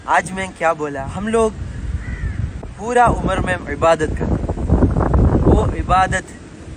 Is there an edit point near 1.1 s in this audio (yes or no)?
yes